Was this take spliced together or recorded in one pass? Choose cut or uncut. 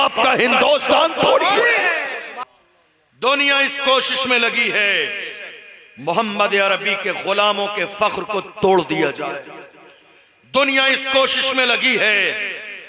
cut